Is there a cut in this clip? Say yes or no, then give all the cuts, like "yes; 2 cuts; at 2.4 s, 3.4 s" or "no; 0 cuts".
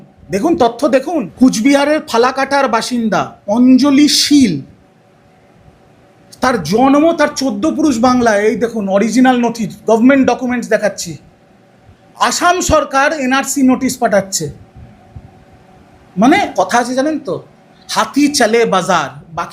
yes; 2 cuts; at 1.3 s, 16.5 s